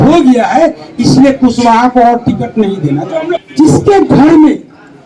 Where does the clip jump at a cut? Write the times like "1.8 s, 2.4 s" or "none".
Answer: 3.4 s